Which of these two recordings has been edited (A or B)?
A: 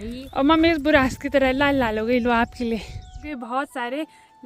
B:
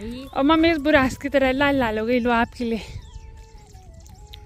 A